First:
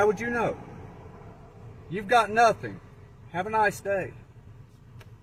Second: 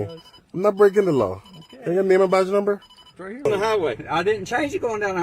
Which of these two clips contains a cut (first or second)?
second